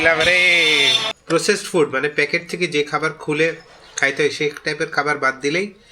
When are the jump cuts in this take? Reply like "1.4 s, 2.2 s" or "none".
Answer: 1.0 s